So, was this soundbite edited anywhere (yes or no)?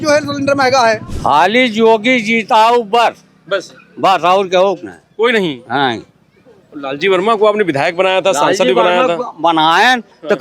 yes